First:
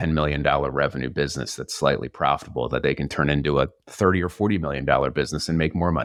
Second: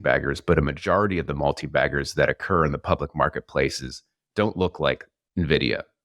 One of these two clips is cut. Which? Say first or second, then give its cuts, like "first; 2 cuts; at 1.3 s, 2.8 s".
second; 1 cut; at 5.2 s